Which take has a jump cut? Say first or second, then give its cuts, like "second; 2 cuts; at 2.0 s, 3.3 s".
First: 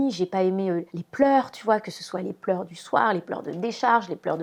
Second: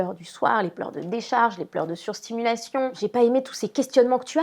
second; 1 cut; at 2.9 s